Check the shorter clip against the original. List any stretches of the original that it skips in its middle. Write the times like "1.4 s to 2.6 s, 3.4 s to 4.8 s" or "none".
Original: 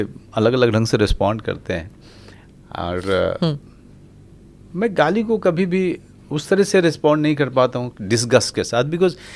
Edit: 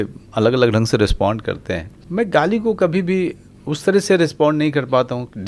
1.9 s to 4.6 s

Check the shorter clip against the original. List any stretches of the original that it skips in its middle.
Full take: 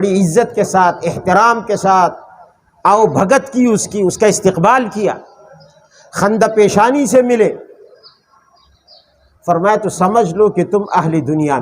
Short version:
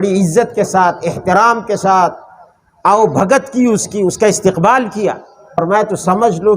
5.6 s to 9.5 s

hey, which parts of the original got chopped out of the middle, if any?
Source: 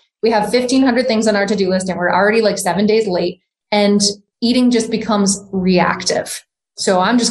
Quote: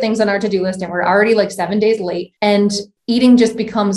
3.8 s to 4.1 s

